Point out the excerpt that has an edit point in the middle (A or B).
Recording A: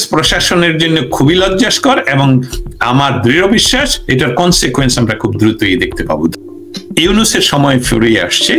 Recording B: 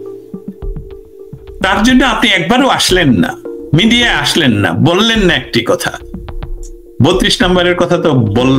A